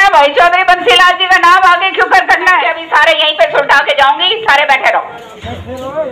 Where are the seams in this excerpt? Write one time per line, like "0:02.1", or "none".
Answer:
0:02.8